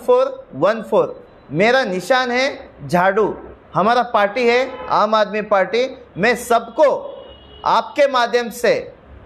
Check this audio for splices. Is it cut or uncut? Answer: uncut